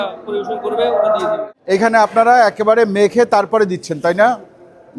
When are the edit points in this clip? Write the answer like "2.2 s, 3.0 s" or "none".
1.4 s